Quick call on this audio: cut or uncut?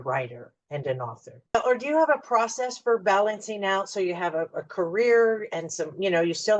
cut